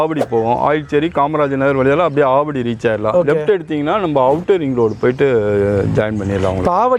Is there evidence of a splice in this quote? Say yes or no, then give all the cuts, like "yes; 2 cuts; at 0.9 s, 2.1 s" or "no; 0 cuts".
no; 0 cuts